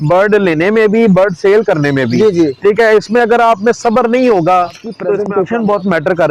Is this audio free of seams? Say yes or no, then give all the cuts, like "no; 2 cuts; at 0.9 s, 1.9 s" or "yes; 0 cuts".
no; 1 cut; at 5.1 s